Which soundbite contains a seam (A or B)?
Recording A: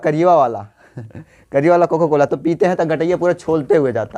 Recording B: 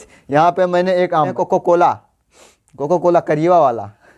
B